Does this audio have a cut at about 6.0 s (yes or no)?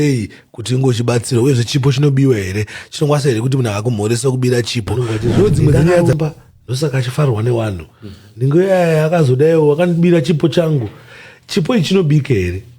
yes